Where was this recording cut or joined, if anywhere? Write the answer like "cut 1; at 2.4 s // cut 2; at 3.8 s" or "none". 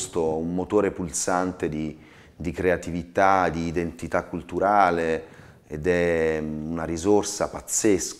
none